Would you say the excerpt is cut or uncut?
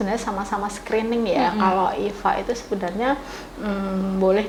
uncut